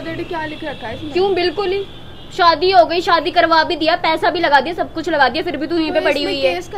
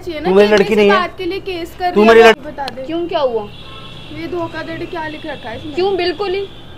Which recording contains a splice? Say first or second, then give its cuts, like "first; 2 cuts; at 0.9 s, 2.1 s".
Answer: second; 1 cut; at 2.3 s